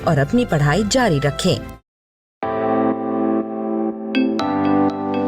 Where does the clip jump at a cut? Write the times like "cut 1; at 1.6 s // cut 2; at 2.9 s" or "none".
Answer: cut 1; at 2.4 s